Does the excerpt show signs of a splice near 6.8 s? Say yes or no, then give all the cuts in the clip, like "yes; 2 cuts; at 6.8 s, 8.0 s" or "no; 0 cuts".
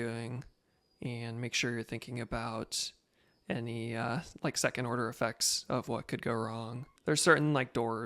yes; 1 cut; at 6.8 s